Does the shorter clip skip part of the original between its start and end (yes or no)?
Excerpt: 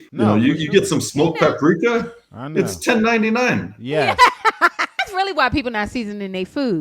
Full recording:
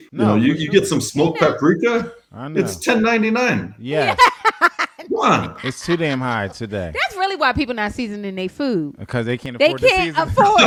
yes